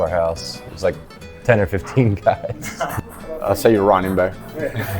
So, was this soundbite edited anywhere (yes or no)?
yes